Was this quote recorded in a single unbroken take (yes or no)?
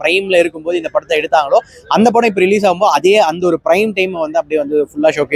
yes